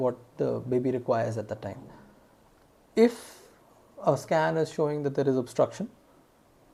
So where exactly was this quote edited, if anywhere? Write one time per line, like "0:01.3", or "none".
none